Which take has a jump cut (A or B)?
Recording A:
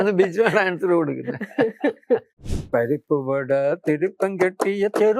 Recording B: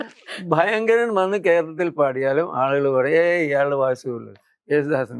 A